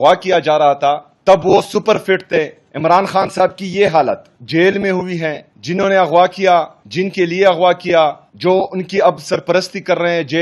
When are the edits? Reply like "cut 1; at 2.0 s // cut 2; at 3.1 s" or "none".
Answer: cut 1; at 1.1 s // cut 2; at 2.6 s // cut 3; at 4.3 s // cut 4; at 5.5 s // cut 5; at 6.8 s // cut 6; at 8.3 s